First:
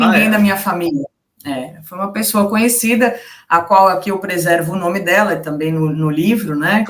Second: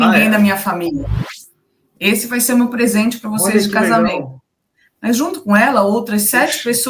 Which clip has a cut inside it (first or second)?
second